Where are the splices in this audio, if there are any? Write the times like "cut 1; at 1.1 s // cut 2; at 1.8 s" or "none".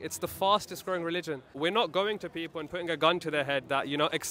cut 1; at 1.5 s